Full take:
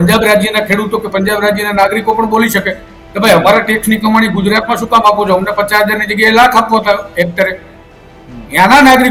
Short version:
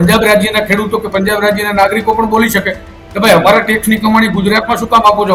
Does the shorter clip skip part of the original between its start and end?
no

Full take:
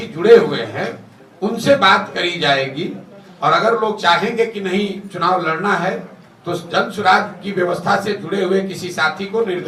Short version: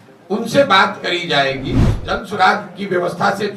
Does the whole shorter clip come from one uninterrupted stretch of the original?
no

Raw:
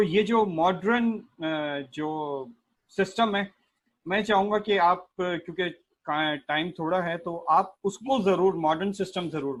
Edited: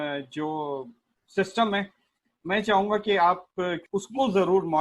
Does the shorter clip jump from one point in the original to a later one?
yes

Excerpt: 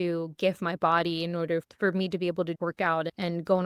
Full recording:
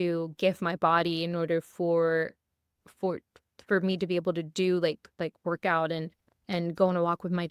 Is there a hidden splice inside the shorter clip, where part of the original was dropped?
yes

